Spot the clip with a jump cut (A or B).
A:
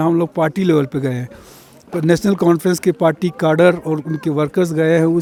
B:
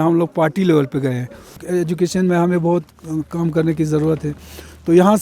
B